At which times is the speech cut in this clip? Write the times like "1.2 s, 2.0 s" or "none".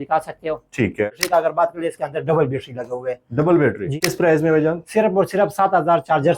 1.1 s, 4.0 s